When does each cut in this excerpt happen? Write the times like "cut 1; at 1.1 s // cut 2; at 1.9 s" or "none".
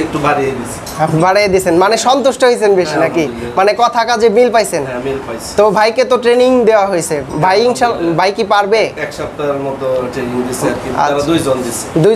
none